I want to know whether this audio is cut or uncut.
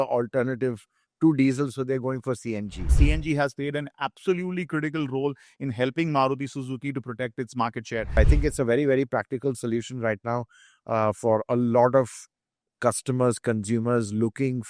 cut